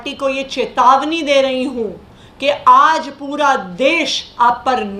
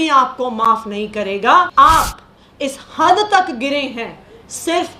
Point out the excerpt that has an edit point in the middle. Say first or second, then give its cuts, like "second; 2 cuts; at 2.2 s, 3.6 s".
second; 1 cut; at 1.7 s